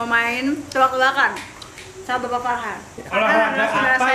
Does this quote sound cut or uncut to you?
uncut